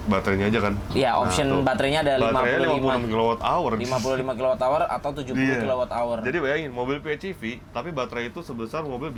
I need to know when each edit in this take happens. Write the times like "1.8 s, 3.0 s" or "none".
none